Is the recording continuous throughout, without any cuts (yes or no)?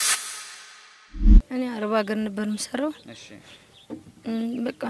no